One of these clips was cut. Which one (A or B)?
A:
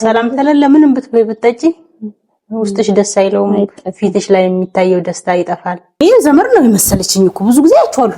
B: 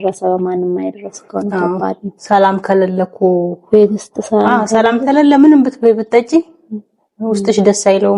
A